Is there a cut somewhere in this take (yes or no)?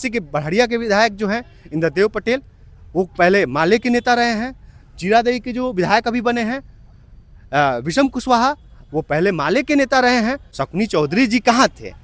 yes